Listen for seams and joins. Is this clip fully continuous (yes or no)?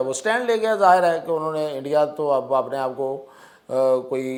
yes